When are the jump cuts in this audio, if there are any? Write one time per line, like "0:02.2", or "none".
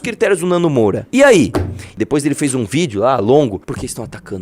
0:01.0
0:01.9
0:03.6